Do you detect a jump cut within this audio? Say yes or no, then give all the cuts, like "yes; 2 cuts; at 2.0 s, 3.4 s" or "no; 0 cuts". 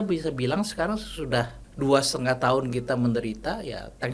yes; 1 cut; at 1.6 s